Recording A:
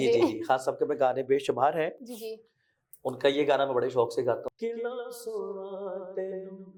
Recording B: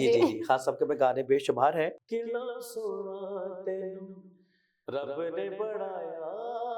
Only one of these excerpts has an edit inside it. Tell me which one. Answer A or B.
B